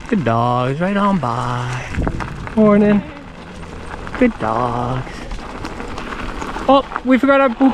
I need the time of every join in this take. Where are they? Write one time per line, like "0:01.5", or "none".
0:05.4